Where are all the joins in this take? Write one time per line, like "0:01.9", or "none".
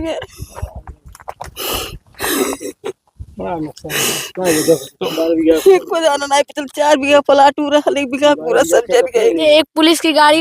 0:09.4